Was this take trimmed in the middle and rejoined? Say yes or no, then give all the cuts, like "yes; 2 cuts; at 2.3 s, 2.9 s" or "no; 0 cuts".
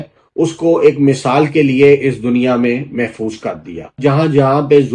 yes; 1 cut; at 4.0 s